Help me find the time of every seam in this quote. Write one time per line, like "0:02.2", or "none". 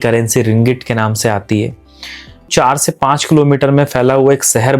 0:02.5